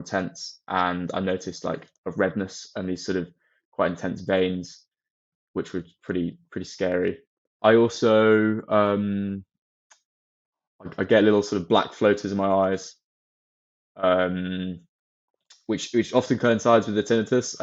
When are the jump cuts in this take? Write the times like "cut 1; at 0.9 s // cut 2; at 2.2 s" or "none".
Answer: cut 1; at 7.5 s